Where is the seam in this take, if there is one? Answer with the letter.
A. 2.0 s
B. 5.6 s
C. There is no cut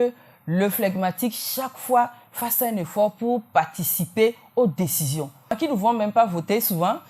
B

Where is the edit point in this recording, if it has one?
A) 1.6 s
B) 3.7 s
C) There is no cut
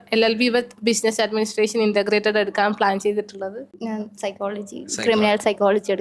B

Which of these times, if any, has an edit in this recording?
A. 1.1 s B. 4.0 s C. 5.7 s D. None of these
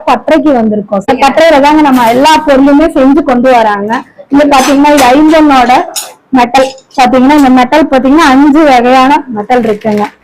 A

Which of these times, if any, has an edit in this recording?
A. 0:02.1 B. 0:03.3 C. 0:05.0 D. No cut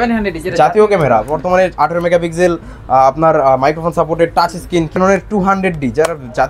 C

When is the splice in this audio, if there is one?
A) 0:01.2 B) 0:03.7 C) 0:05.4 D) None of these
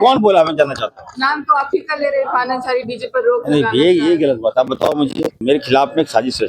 C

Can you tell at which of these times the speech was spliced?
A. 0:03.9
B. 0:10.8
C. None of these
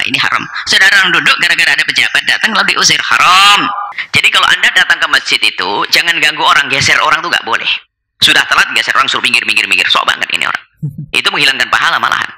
A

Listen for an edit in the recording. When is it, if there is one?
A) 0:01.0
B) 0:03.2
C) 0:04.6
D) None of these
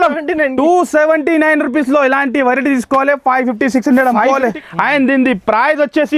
C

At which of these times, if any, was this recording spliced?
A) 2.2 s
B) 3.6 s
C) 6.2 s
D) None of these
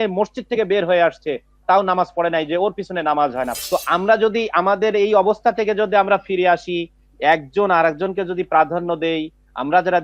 B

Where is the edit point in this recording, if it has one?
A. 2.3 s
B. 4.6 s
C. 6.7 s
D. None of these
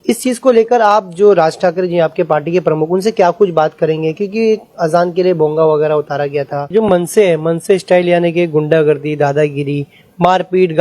C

